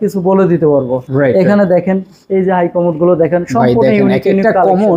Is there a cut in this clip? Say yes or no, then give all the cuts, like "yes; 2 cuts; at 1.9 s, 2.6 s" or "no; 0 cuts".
no; 0 cuts